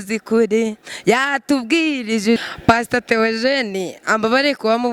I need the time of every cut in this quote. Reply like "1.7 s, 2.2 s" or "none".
2.4 s